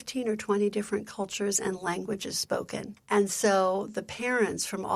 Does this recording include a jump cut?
yes; 1 cut; at 2.9 s

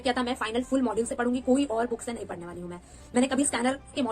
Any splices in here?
no; 0 cuts

